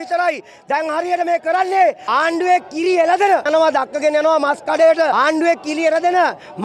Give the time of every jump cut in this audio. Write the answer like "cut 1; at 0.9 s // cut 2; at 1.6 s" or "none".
cut 1; at 2.0 s // cut 2; at 3.5 s // cut 3; at 5.1 s